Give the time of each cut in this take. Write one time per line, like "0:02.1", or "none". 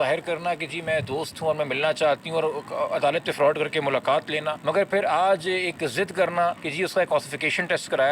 0:04.5
0:06.6

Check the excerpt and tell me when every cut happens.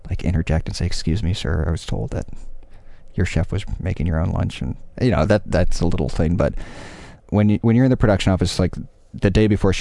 0:07.2

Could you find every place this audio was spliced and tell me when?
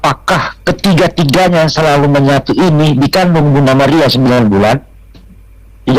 none

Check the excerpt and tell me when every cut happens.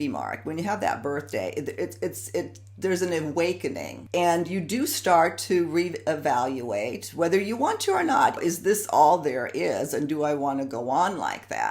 0:03.9
0:08.4

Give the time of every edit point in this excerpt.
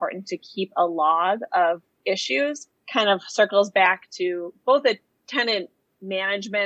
0:02.7
0:05.1

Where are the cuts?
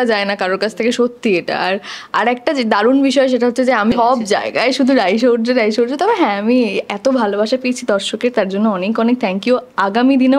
0:03.9

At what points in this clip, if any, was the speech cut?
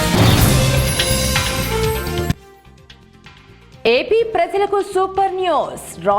0:03.9

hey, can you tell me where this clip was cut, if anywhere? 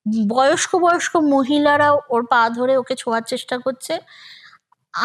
none

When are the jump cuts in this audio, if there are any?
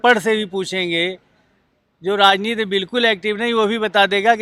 none

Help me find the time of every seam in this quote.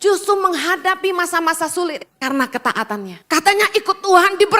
0:02.1
0:03.2

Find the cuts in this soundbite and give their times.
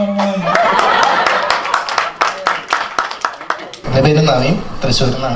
0:03.8

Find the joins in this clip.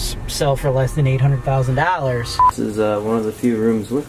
0:02.4

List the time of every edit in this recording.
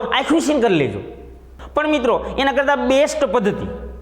0:01.5

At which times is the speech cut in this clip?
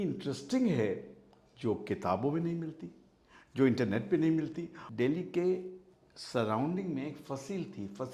0:04.8

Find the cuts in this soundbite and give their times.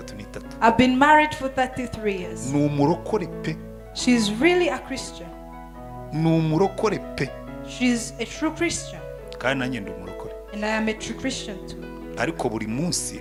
none

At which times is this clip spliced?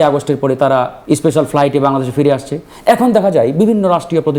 0:01.0

